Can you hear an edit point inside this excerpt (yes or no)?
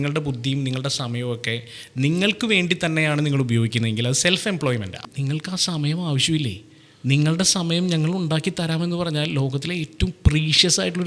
yes